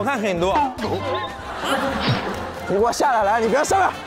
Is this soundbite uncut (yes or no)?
yes